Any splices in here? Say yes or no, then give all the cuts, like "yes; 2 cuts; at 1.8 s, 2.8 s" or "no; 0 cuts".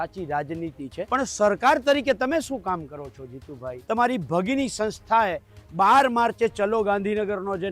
yes; 2 cuts; at 1.0 s, 3.7 s